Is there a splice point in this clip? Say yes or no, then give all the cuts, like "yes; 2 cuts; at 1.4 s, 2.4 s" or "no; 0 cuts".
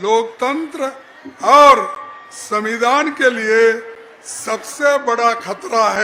no; 0 cuts